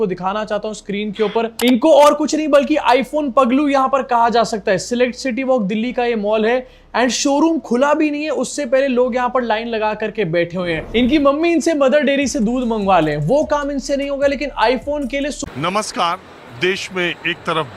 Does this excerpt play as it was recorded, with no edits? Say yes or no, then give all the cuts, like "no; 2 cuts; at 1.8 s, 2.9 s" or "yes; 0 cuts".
no; 1 cut; at 15.4 s